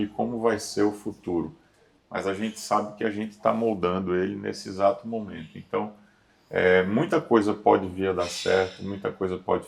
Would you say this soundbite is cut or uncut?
uncut